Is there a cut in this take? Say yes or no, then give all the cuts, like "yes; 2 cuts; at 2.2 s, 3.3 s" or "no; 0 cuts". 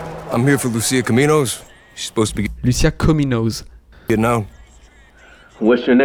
no; 0 cuts